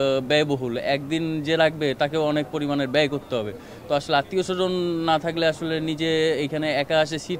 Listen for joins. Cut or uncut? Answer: uncut